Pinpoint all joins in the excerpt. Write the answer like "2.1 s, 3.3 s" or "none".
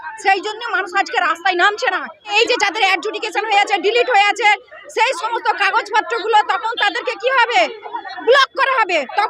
2.3 s